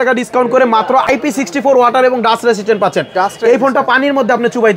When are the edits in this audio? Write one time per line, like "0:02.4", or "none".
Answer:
0:01.1